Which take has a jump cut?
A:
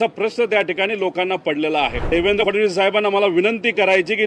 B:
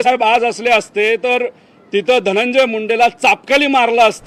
A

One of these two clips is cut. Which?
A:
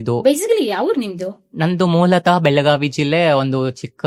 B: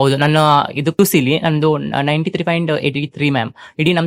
B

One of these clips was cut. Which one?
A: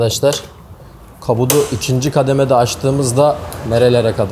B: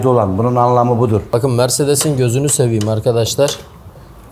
B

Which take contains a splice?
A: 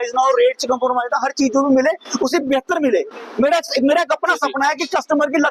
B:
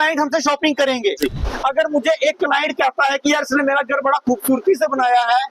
B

